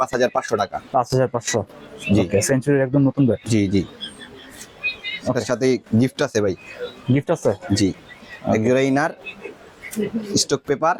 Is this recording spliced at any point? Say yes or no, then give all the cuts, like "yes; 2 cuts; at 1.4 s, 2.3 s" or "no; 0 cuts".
no; 0 cuts